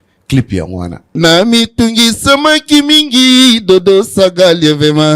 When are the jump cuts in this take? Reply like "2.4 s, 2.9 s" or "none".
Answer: 1.1 s